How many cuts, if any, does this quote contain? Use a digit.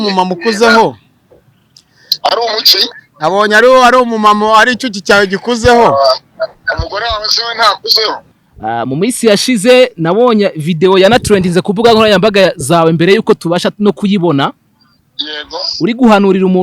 1